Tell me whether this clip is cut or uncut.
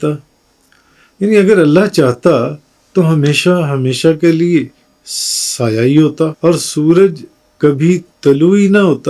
cut